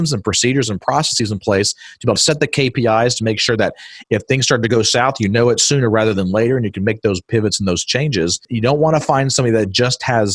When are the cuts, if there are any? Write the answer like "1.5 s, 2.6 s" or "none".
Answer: 1.1 s, 2.2 s, 8.4 s